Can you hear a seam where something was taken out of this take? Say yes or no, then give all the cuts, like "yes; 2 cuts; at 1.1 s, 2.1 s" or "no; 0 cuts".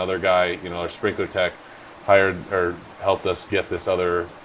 no; 0 cuts